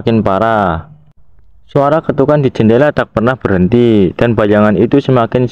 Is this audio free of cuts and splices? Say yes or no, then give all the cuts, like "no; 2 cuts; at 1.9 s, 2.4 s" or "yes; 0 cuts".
yes; 0 cuts